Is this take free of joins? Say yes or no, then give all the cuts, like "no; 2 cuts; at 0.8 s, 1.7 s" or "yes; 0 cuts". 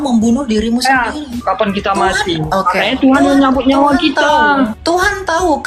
no; 2 cuts; at 1.3 s, 4.8 s